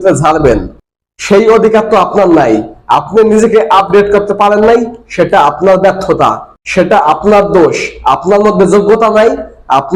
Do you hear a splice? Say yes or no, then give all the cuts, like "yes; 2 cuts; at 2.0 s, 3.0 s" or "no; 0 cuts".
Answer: no; 0 cuts